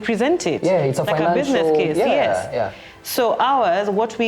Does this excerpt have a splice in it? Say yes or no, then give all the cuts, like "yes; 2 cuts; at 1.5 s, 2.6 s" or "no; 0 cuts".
no; 0 cuts